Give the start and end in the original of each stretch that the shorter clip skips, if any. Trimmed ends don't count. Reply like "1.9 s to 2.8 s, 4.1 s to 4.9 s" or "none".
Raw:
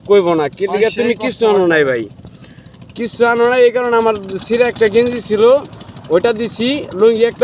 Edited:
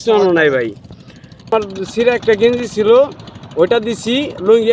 2.8 s to 4.0 s